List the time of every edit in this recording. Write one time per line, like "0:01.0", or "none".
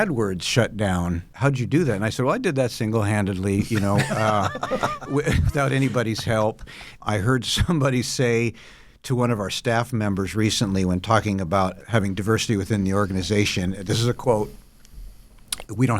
0:01.3
0:06.9
0:11.8